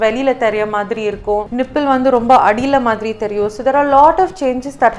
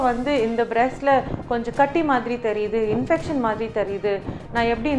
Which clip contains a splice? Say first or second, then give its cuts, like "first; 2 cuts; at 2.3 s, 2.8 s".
first; 1 cut; at 1.5 s